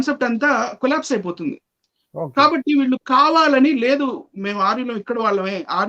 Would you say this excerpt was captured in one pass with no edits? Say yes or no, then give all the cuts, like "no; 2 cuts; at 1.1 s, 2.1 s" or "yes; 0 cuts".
yes; 0 cuts